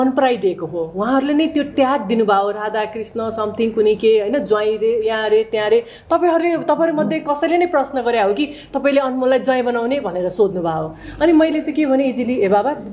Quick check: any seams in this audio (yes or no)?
no